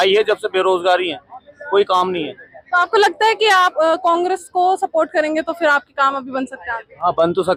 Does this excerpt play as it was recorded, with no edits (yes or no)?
yes